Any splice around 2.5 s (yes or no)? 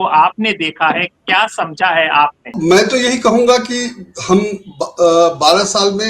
yes